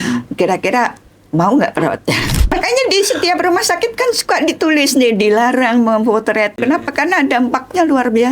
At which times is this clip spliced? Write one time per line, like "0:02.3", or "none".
0:02.5
0:06.6